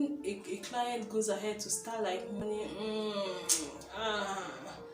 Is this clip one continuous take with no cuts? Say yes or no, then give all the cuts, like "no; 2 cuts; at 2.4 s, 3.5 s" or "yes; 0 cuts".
no; 1 cut; at 2.4 s